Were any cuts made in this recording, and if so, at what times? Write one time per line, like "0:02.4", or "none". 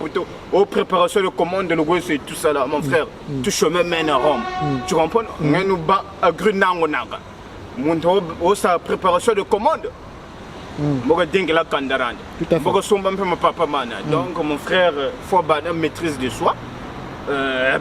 none